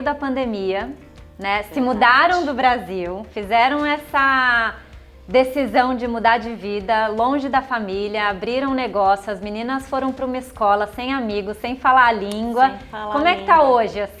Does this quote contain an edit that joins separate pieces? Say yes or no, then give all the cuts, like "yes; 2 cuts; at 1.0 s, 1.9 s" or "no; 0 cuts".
no; 0 cuts